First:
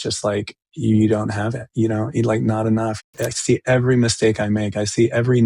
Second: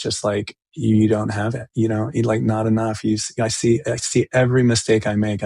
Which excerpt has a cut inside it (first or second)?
first